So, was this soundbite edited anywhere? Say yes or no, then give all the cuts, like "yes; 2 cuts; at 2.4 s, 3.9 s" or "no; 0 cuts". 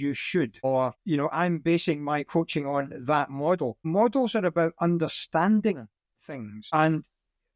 yes; 3 cuts; at 0.9 s, 3.8 s, 6.6 s